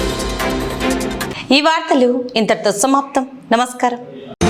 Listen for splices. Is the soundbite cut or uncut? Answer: uncut